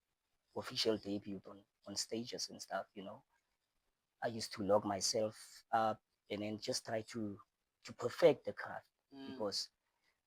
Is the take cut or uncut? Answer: uncut